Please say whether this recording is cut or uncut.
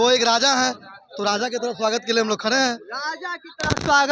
uncut